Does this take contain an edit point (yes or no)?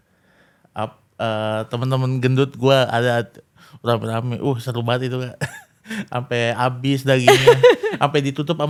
no